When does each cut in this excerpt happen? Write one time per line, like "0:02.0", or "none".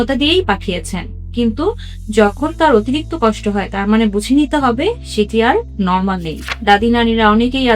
0:06.5